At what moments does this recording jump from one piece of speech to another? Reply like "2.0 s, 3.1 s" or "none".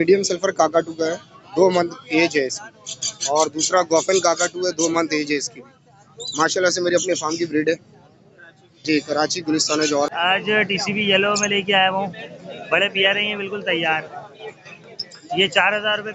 10.1 s